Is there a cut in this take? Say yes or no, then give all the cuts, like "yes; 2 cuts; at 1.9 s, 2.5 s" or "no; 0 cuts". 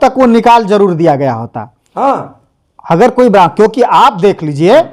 no; 0 cuts